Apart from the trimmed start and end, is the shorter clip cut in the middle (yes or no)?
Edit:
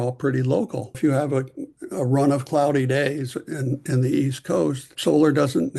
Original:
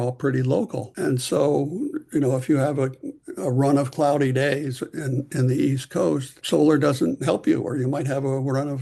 yes